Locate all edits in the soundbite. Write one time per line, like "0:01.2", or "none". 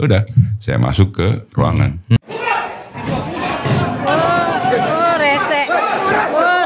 0:02.2

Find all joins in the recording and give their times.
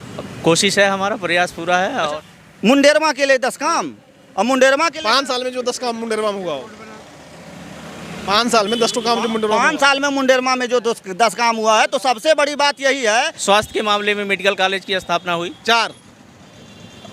0:02.2
0:13.4

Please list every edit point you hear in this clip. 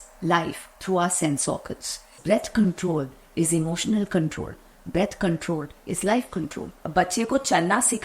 0:02.2
0:06.8

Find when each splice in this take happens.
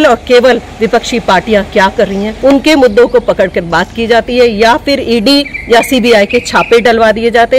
0:02.3
0:05.5

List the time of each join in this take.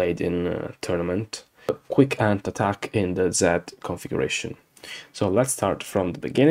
0:01.5

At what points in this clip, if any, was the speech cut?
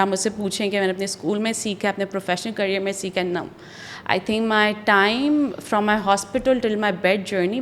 none

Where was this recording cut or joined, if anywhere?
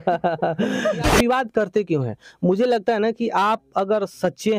0:01.1

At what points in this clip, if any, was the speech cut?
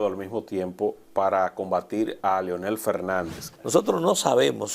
0:03.4

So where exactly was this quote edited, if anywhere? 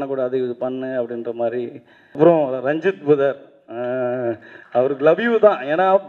0:02.2

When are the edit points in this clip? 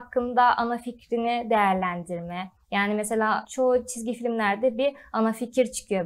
0:03.5

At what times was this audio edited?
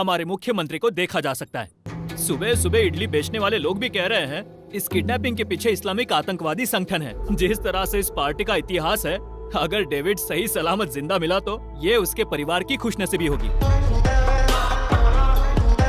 0:01.9
0:07.2
0:13.5

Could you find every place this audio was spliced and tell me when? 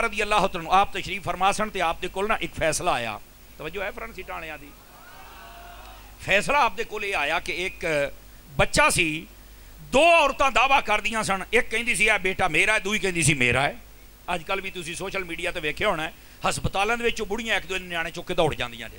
none

